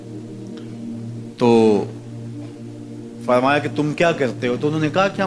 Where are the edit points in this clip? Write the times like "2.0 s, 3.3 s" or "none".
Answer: 1.9 s, 3.3 s